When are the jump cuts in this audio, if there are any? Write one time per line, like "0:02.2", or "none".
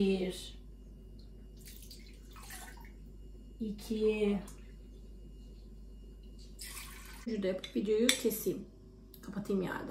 0:07.3